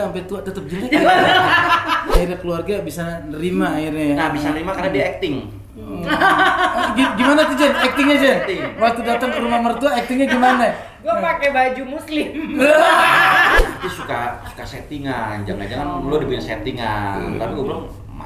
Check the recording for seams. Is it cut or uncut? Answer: cut